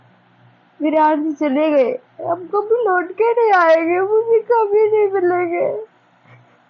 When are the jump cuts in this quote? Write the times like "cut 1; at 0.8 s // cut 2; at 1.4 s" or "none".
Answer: none